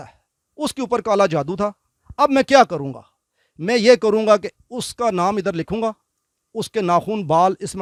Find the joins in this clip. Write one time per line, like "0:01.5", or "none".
none